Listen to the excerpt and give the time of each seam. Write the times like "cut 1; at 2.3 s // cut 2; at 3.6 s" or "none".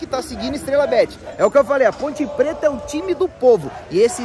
cut 1; at 1.2 s